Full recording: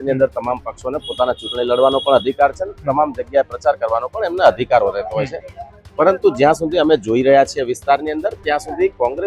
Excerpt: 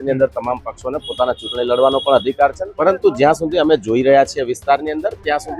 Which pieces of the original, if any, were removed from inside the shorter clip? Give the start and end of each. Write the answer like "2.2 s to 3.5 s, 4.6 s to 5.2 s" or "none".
2.7 s to 5.9 s